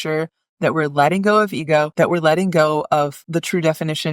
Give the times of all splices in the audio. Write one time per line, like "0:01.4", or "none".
0:01.9
0:03.2